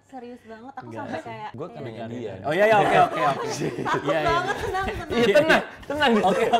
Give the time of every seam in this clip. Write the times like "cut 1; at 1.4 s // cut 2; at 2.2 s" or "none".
cut 1; at 1.5 s